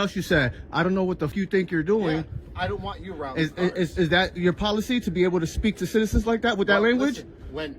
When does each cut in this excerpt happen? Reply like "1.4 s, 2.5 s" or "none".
1.3 s